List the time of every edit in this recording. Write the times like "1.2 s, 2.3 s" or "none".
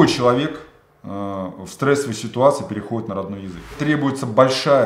3.8 s